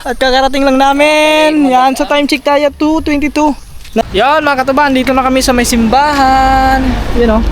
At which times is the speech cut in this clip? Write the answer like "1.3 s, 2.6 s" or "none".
4.0 s